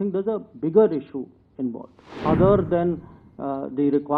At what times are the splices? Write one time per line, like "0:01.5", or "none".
0:02.2